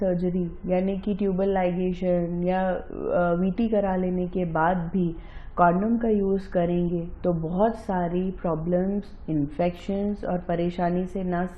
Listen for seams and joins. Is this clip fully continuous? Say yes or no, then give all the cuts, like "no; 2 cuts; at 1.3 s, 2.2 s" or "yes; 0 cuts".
yes; 0 cuts